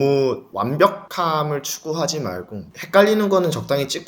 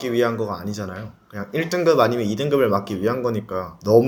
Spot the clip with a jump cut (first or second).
first